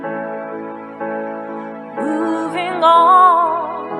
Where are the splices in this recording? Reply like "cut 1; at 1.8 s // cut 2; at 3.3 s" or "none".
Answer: cut 1; at 3.1 s